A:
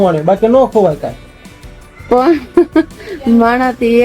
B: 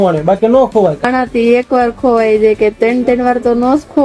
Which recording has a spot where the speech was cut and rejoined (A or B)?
B